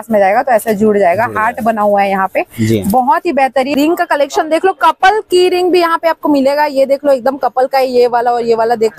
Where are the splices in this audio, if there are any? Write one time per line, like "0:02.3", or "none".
0:03.7

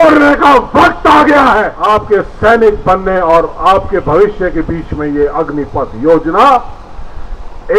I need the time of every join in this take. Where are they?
0:01.7

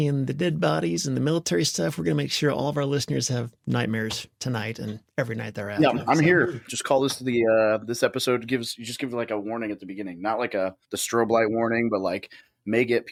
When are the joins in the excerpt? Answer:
none

